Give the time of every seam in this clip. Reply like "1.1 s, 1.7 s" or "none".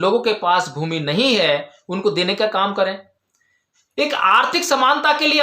none